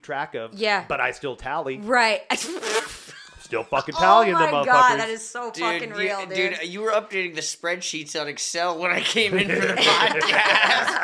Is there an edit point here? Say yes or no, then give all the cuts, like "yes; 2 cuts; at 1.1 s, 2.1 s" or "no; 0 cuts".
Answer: no; 0 cuts